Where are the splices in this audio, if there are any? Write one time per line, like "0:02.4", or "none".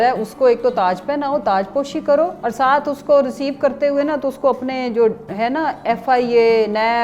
none